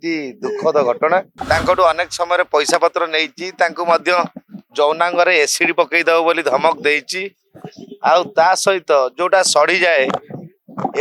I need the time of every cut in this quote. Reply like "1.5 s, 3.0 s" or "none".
1.3 s